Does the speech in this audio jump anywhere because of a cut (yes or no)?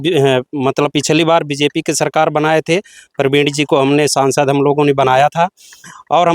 no